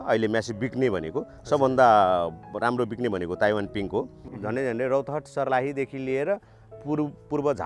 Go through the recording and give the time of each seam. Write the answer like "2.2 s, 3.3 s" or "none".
4.2 s